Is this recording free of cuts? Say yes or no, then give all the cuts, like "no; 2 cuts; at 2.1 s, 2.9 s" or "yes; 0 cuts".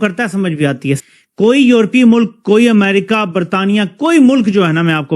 no; 1 cut; at 1.0 s